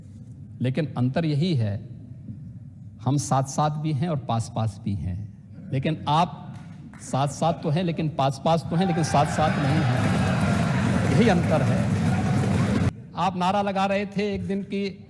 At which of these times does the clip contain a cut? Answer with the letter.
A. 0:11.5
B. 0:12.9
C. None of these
B